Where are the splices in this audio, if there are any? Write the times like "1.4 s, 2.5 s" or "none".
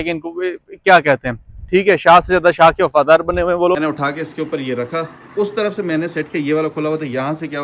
3.8 s